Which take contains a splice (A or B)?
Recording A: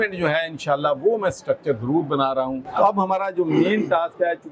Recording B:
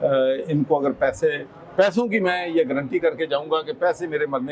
A